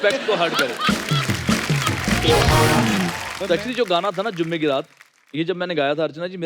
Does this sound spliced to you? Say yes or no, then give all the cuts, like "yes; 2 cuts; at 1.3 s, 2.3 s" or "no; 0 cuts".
yes; 1 cut; at 3.3 s